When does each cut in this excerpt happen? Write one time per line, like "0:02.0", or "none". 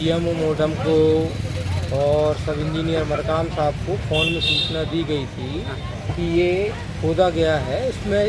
none